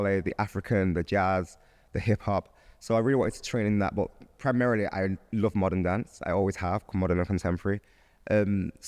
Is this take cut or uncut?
uncut